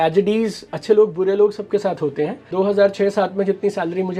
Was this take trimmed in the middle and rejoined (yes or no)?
yes